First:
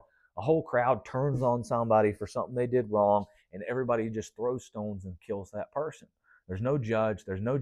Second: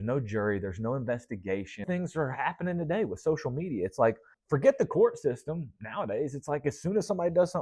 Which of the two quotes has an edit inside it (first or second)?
second